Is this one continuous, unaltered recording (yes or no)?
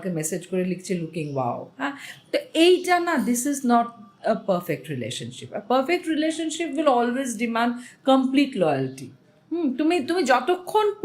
yes